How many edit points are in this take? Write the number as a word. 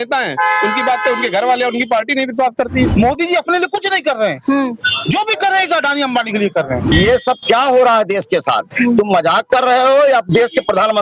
two